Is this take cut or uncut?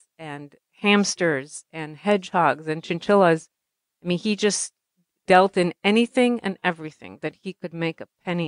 cut